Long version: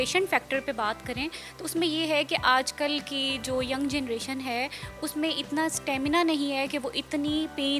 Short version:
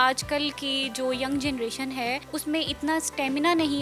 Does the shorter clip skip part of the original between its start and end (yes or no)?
yes